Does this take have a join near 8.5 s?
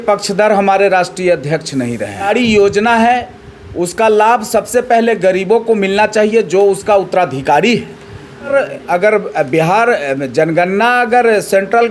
yes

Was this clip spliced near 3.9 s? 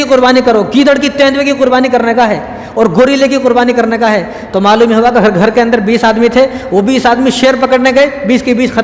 no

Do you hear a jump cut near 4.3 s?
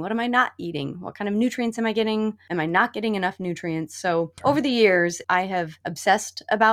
yes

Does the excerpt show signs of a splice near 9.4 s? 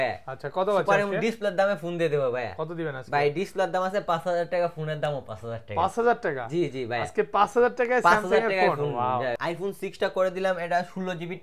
yes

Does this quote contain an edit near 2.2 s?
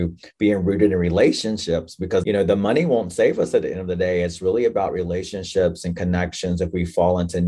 yes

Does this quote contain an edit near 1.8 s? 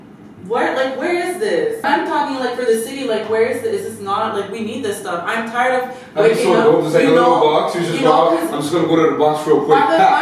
yes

